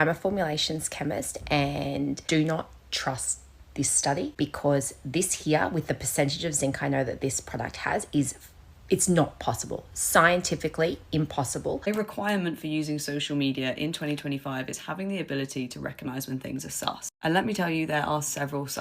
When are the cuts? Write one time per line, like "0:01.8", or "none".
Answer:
0:02.2
0:04.3
0:11.8